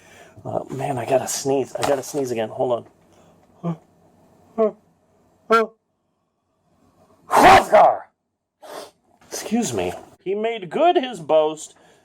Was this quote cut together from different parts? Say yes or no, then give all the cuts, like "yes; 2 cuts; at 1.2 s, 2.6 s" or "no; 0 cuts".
yes; 1 cut; at 10.2 s